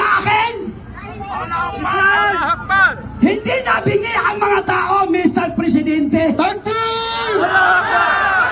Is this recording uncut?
no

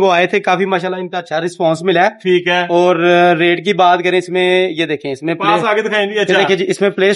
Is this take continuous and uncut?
yes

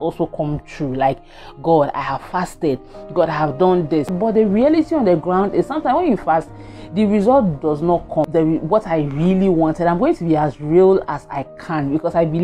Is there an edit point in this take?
yes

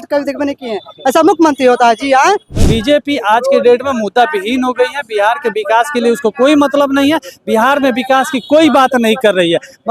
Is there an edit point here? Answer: yes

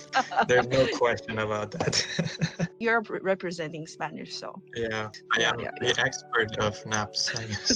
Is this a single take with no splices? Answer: no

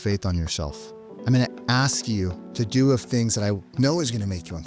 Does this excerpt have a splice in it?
yes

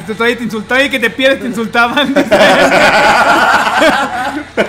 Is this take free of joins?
yes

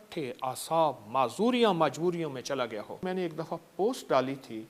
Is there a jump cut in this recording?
yes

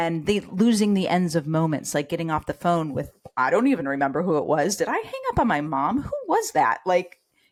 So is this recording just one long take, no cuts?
yes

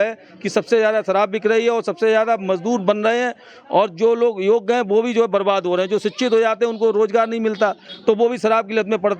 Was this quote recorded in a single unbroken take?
yes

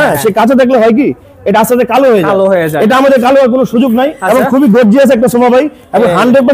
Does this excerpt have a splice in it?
no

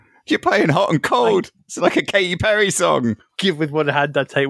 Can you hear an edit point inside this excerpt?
no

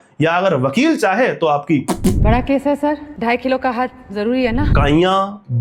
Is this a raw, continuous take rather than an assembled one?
no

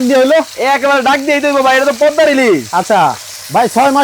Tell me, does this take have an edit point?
no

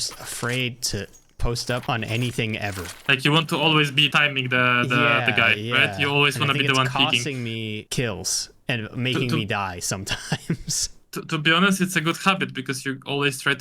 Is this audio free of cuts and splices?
no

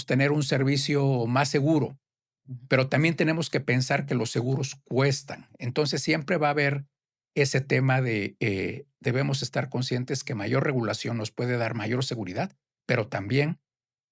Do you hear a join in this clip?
no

